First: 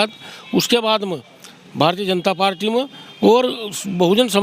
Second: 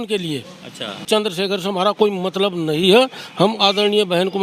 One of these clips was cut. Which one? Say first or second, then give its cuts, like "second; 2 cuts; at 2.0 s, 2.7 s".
second; 1 cut; at 1.0 s